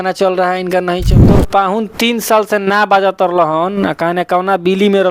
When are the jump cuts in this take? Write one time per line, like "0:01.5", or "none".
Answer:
0:01.2